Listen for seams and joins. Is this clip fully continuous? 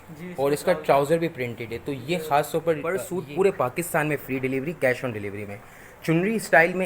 no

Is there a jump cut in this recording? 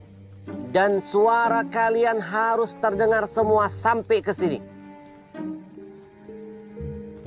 no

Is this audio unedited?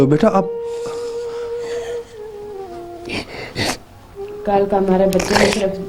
yes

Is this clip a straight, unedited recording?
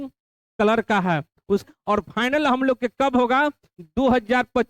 no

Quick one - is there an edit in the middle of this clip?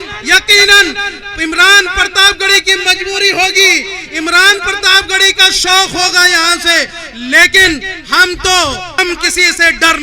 yes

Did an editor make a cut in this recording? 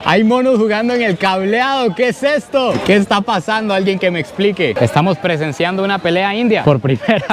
yes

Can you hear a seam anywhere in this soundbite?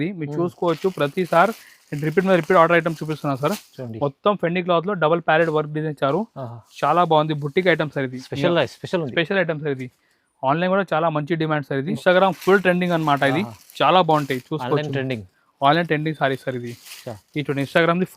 yes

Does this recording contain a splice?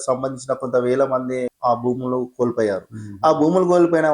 yes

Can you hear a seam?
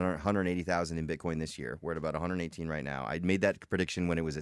no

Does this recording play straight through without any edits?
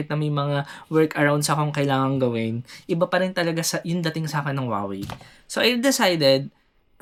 yes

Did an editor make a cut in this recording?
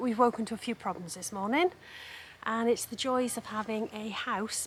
no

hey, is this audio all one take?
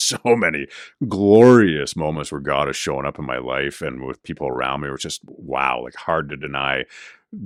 yes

